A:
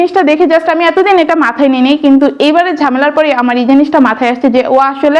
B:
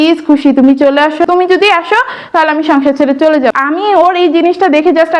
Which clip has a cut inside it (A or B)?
B